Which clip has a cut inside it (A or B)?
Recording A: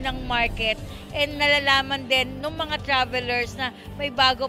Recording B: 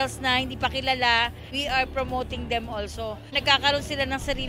B